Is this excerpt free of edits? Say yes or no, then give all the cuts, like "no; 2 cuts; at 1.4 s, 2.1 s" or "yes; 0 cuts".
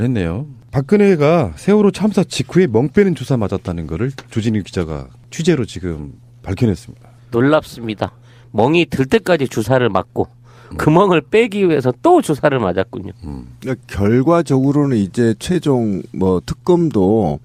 yes; 0 cuts